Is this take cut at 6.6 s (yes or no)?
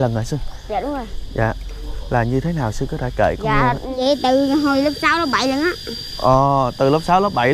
no